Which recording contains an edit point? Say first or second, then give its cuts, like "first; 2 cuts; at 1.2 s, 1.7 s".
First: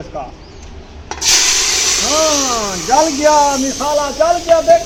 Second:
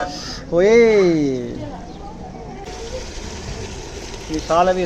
second; 1 cut; at 2.7 s